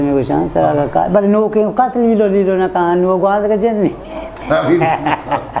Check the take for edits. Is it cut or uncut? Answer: uncut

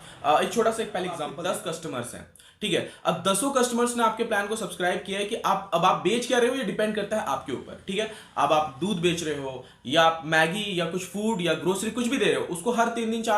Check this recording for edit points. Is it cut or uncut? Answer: cut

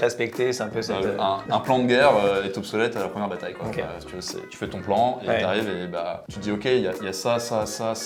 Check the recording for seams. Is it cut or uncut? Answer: uncut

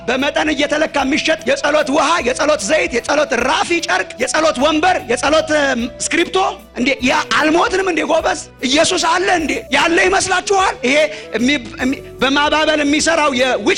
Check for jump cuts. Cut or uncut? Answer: uncut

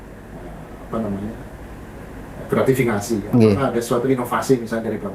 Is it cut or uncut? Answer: uncut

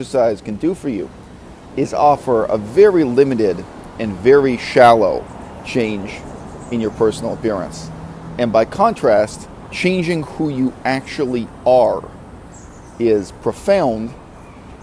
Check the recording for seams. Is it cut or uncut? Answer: cut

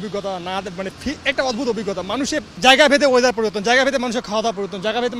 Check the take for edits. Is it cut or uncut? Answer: cut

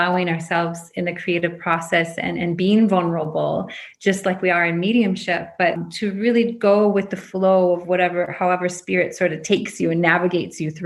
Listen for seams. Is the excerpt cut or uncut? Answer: cut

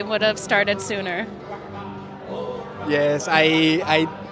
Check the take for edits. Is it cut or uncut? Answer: uncut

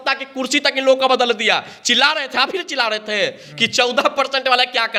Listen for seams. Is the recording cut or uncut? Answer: uncut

